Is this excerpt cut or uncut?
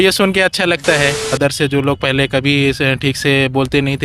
cut